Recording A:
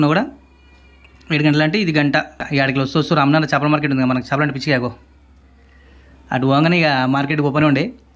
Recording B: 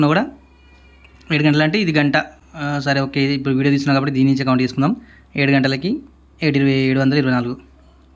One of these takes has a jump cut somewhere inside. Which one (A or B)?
A